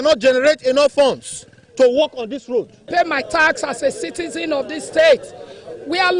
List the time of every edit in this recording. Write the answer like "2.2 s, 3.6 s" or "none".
2.9 s

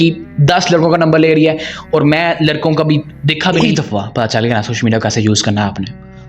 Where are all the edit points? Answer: 3.6 s

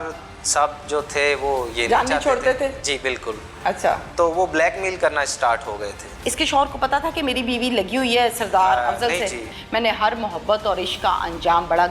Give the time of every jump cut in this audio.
6.1 s, 9.5 s

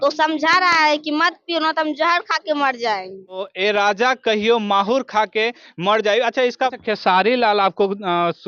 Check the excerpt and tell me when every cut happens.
3.4 s, 6.8 s

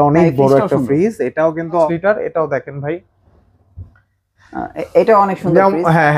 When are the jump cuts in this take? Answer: 1.9 s

